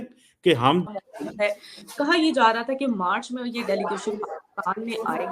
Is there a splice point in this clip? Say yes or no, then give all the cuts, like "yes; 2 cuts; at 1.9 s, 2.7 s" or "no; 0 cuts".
yes; 1 cut; at 0.9 s